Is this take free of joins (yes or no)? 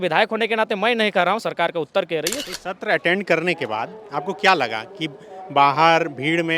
no